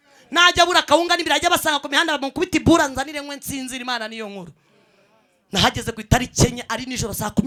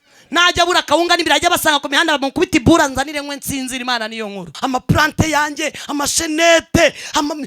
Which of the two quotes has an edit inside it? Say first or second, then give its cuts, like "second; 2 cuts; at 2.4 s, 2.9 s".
second; 1 cut; at 4.5 s